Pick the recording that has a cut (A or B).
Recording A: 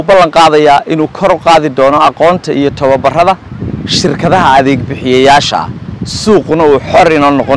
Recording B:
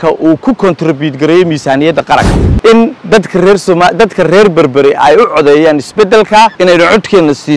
B